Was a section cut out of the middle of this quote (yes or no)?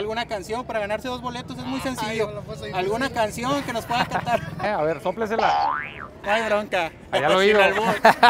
yes